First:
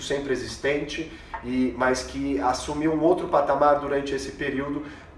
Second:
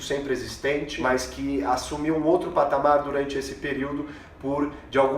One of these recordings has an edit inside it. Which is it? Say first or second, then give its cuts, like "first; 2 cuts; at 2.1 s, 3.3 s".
second; 1 cut; at 1.0 s